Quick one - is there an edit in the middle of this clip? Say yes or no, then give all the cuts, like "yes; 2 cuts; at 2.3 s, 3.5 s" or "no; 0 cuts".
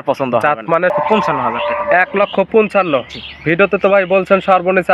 yes; 1 cut; at 0.9 s